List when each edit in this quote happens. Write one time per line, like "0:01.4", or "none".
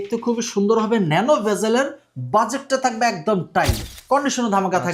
0:03.9